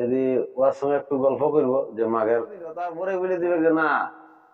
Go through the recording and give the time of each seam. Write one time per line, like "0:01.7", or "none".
0:03.0